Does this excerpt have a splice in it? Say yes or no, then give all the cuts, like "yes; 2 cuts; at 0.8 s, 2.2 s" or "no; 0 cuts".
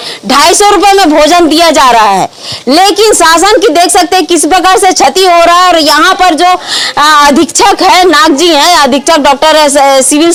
no; 0 cuts